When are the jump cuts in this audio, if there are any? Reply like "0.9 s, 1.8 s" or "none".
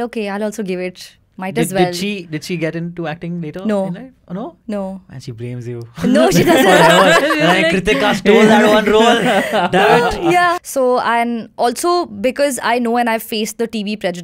10.6 s